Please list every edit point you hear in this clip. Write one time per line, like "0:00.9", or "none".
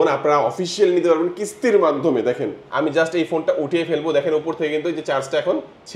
0:02.6

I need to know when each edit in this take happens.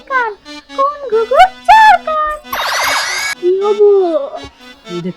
0:03.3

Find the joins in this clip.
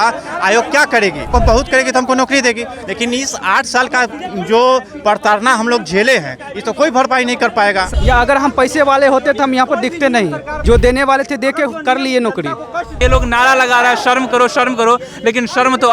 0:01.3
0:07.9
0:10.5
0:12.9

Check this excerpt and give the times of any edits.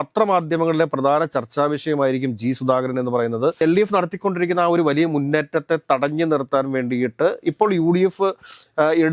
0:03.6

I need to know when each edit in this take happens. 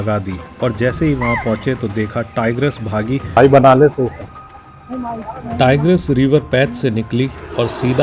0:03.4

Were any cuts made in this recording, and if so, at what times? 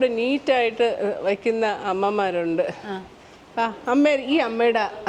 none

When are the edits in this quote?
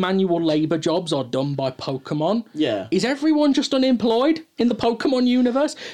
none

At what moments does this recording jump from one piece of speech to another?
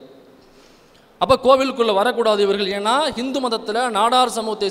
none

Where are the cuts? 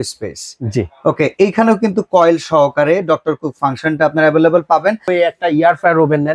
0:05.1

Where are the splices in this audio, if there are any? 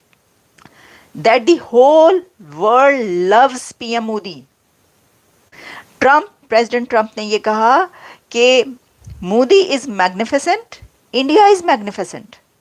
none

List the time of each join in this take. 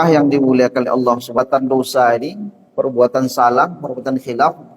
0:01.4

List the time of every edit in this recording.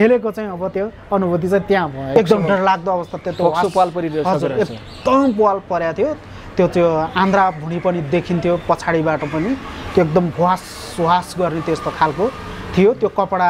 0:02.1

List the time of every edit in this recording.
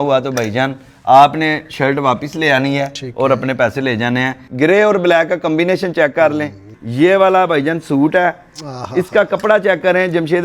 0:04.4
0:06.7

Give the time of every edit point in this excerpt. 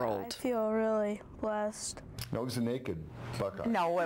0:02.2

